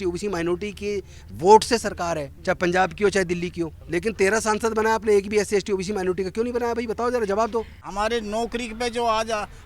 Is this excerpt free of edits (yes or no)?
no